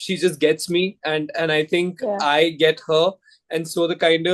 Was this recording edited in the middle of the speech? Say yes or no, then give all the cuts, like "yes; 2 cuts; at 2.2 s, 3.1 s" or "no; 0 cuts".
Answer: no; 0 cuts